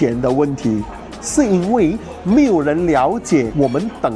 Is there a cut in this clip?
no; 0 cuts

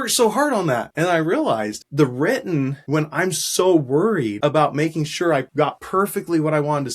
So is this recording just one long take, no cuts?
no; 5 cuts; at 0.9 s, 1.8 s, 2.8 s, 4.3 s, 5.6 s

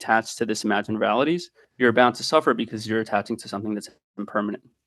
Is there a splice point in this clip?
yes; 1 cut; at 1.6 s

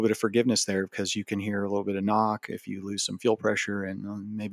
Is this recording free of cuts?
yes; 0 cuts

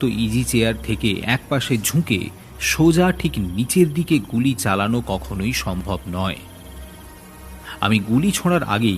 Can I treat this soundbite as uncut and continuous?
no; 2 cuts; at 6.4 s, 7.8 s

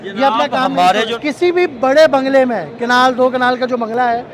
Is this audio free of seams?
no; 1 cut; at 1.1 s

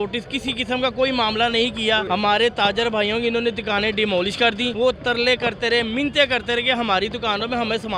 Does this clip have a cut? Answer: yes; 2 cuts; at 2.0 s, 4.7 s

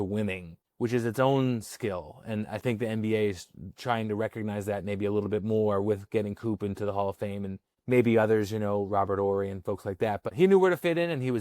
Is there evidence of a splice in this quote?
yes; 1 cut; at 10.3 s

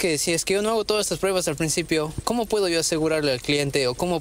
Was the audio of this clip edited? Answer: yes; 1 cut; at 2.2 s

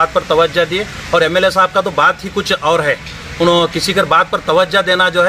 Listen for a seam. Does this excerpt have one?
no; 0 cuts

